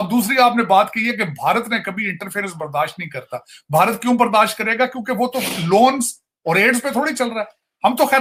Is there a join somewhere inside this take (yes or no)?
no